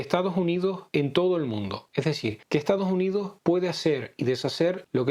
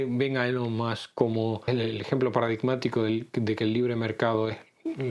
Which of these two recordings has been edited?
second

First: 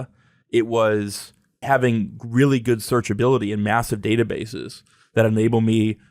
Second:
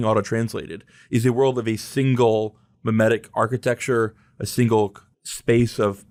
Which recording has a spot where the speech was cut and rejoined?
first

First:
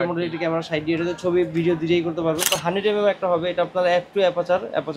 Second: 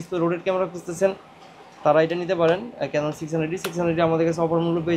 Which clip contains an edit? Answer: first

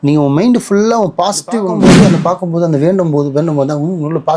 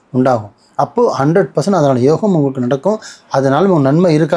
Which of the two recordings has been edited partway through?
first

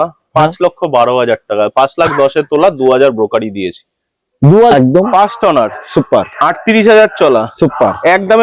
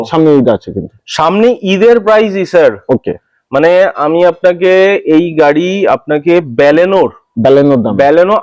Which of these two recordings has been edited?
first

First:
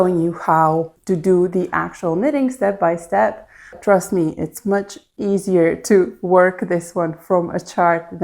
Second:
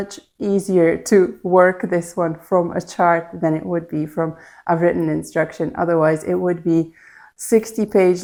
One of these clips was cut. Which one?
first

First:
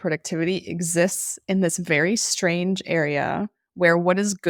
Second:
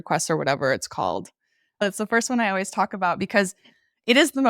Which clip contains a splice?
second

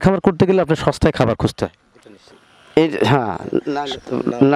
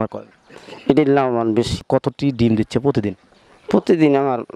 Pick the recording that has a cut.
second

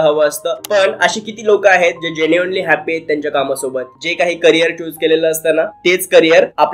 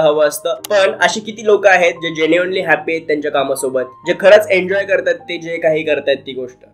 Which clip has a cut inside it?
first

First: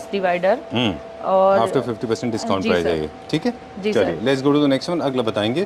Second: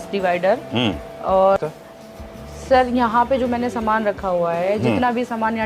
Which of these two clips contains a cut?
second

